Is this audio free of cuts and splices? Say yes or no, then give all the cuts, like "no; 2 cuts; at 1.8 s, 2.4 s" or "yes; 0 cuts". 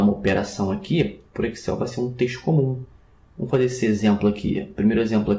no; 1 cut; at 4.1 s